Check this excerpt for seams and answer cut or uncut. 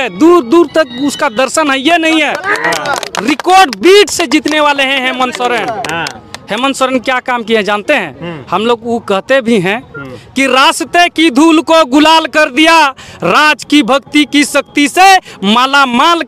uncut